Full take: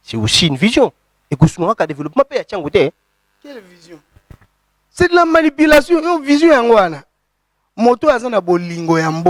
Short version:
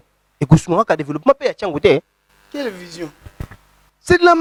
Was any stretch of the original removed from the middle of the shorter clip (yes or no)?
no